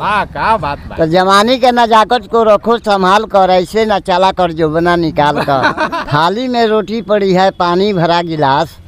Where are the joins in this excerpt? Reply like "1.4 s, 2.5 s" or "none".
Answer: 6.0 s

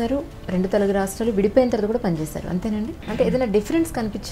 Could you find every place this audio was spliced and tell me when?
3.0 s

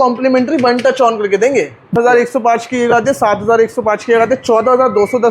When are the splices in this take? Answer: 1.9 s

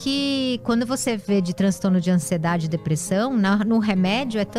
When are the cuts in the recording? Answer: none

